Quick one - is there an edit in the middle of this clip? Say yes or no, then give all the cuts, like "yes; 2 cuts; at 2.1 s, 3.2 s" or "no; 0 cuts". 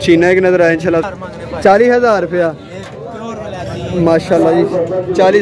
yes; 1 cut; at 1.1 s